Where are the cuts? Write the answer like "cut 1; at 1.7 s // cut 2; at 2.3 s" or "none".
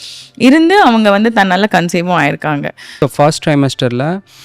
cut 1; at 2.8 s